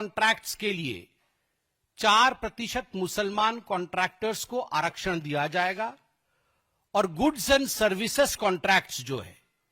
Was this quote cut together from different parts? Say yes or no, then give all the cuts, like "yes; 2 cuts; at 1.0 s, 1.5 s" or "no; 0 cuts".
no; 0 cuts